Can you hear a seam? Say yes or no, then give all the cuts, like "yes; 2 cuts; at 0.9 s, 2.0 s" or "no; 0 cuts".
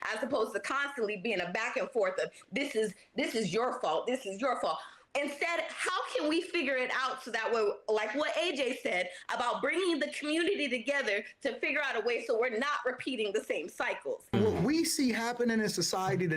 yes; 1 cut; at 14.3 s